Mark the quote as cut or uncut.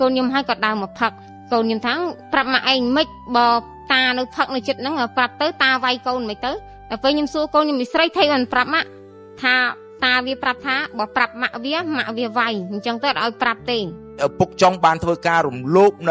cut